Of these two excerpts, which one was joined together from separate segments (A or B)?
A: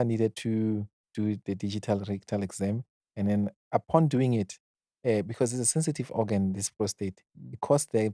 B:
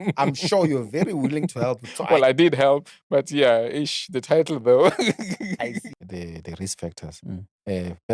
B